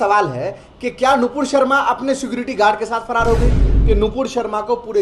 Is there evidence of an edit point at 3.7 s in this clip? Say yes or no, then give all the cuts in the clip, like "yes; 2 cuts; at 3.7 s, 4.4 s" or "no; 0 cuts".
yes; 1 cut; at 3.7 s